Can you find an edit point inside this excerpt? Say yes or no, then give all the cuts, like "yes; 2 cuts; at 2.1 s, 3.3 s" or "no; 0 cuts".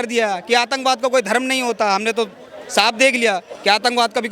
no; 0 cuts